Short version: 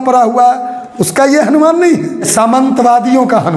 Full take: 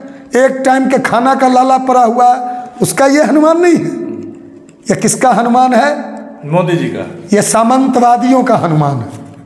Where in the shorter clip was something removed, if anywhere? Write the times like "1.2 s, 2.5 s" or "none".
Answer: 2.3 s